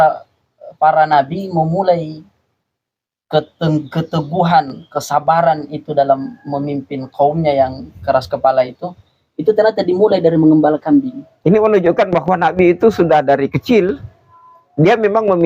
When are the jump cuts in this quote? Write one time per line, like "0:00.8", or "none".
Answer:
0:11.2